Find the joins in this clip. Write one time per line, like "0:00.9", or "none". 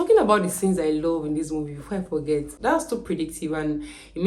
0:02.5

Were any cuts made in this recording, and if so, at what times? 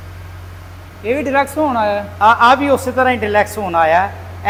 none

